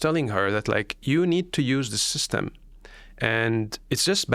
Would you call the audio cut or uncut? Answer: uncut